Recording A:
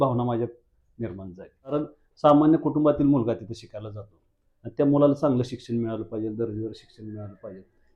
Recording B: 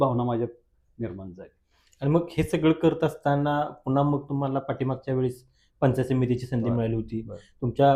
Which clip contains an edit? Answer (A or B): A